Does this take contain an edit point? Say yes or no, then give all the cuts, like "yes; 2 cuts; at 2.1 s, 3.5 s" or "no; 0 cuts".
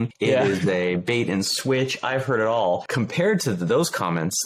no; 0 cuts